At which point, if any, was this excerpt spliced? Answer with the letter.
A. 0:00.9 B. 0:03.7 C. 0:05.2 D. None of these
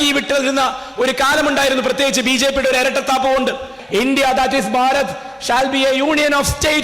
B